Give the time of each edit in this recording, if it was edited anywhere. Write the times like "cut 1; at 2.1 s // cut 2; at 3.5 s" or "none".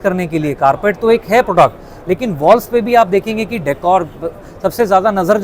none